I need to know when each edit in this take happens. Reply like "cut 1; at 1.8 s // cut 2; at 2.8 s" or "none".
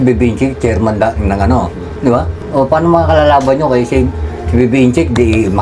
none